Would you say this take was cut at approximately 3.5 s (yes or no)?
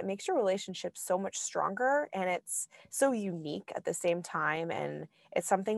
no